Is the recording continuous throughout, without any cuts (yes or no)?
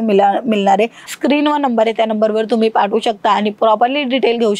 no